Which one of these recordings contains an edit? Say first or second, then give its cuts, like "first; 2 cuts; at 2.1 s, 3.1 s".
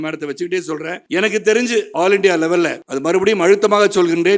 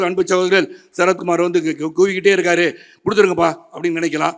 first; 3 cuts; at 1.0 s, 1.9 s, 2.8 s